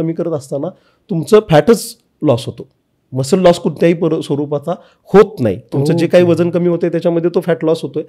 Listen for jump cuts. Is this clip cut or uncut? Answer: uncut